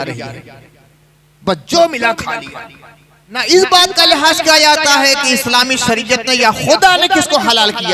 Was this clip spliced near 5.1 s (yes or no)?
no